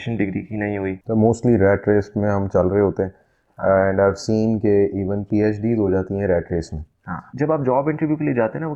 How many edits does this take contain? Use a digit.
2